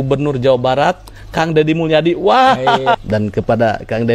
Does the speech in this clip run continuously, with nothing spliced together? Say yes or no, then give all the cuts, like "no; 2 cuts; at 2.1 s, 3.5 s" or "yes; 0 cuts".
no; 1 cut; at 3.0 s